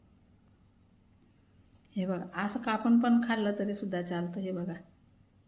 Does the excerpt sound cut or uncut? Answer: uncut